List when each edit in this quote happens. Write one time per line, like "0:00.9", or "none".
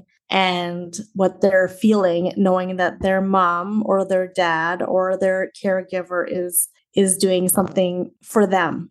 none